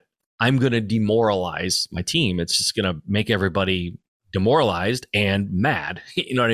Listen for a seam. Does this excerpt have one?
no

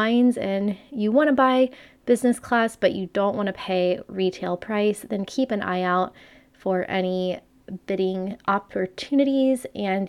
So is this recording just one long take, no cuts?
yes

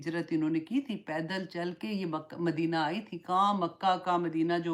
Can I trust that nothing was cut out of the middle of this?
yes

